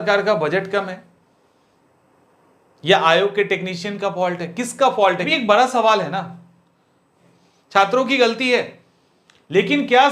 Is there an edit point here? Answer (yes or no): yes